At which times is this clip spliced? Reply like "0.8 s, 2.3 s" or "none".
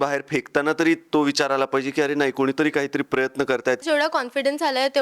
3.8 s